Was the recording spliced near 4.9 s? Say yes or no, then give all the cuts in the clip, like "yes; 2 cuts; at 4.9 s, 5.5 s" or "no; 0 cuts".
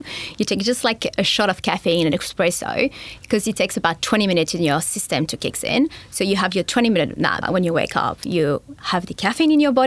no; 1 cut; at 7.4 s